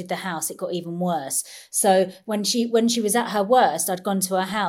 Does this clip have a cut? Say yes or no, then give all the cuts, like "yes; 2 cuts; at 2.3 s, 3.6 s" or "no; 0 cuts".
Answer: yes; 1 cut; at 2.2 s